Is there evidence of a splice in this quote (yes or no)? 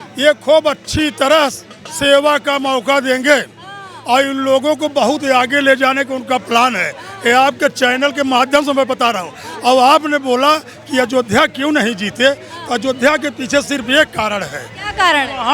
no